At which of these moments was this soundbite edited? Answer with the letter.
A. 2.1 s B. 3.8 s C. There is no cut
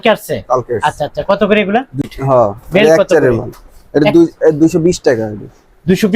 A